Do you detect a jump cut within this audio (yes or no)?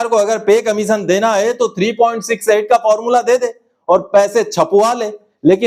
no